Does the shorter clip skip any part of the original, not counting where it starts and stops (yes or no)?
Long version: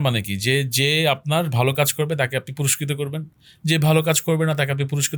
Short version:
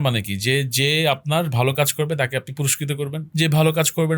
yes